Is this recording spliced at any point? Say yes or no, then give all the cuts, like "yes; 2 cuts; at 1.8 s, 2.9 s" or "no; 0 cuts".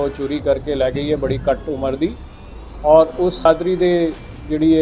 yes; 1 cut; at 3.5 s